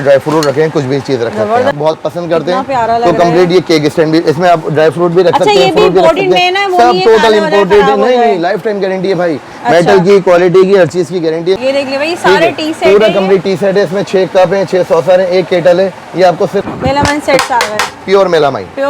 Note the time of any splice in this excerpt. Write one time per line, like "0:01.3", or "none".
0:01.7
0:11.6
0:16.6